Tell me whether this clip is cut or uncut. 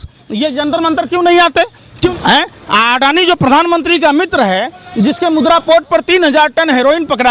cut